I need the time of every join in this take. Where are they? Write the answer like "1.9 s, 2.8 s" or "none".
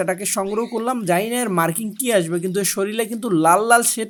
none